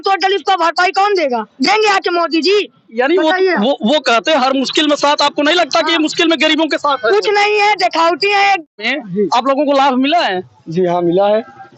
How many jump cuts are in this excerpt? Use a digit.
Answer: 1